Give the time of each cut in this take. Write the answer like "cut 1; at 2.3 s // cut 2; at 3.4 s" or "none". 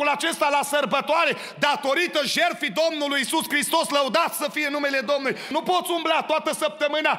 cut 1; at 5.5 s